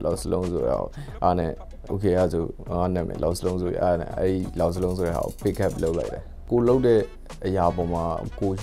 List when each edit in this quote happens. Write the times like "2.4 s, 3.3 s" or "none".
6.4 s